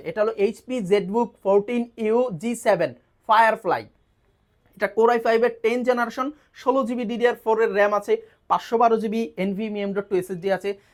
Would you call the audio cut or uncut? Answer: uncut